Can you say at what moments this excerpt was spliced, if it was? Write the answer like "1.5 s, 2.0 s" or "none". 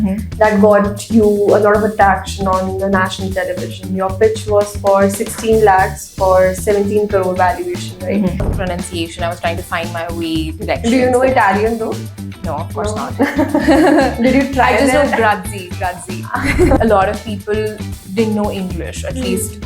8.5 s, 16.8 s